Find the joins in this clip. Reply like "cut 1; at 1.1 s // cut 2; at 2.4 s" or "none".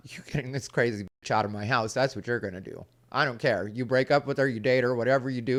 none